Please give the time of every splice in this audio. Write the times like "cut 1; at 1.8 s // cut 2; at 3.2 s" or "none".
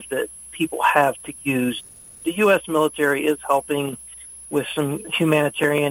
cut 1; at 1.8 s // cut 2; at 5.0 s